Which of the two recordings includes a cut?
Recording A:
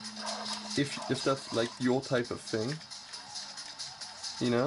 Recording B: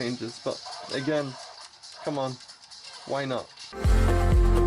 B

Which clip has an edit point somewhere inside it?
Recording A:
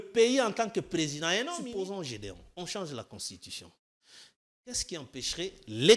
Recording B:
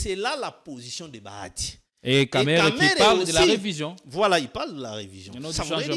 A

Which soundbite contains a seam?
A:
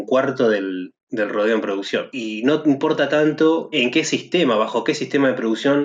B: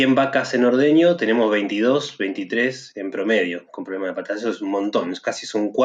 A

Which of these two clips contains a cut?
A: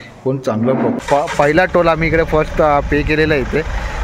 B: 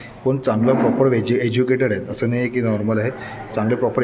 A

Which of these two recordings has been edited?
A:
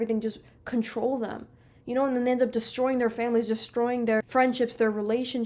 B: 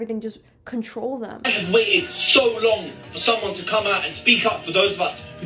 B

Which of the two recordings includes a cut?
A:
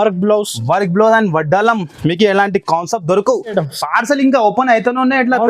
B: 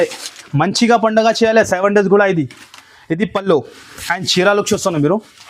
A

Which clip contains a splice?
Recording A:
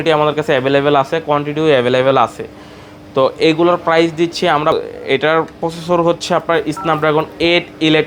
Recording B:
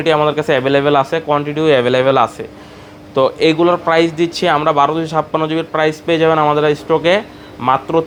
A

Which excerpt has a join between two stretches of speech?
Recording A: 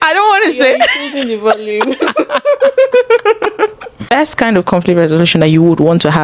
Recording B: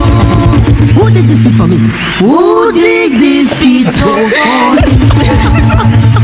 A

